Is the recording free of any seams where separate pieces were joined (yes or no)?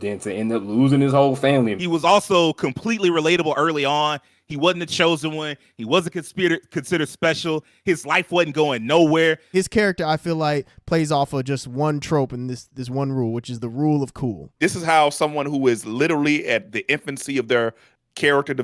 no